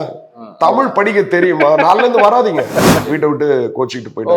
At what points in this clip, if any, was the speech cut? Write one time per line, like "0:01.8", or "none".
0:03.0